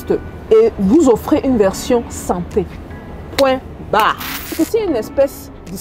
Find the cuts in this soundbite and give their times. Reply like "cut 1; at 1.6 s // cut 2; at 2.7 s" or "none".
cut 1; at 4.6 s